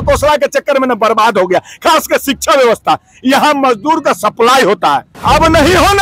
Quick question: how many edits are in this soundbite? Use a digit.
1